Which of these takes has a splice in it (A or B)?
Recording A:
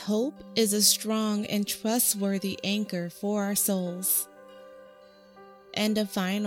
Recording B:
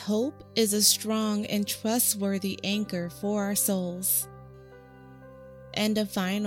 B